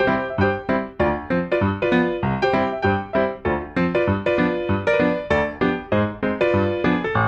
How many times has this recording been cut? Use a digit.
0